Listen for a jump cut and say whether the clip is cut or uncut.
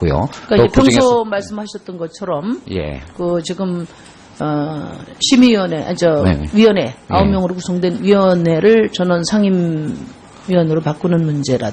uncut